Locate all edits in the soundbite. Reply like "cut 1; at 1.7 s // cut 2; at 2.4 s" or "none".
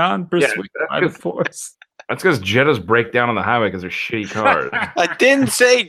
none